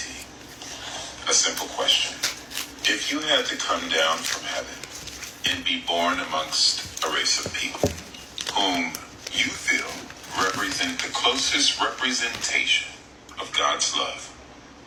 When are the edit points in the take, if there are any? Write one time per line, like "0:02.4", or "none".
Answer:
none